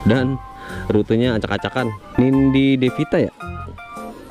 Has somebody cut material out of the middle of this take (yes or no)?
yes